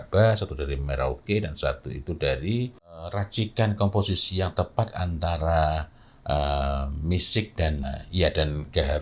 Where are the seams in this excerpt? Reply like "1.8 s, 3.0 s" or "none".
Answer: 3.2 s, 7.8 s